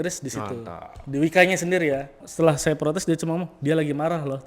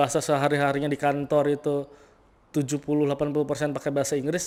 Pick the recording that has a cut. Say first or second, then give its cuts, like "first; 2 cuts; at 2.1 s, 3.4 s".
first; 1 cut; at 2.2 s